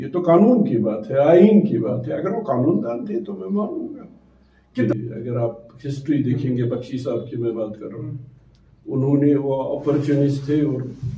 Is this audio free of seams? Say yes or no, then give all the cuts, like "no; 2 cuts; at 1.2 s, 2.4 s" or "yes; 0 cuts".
no; 1 cut; at 4.9 s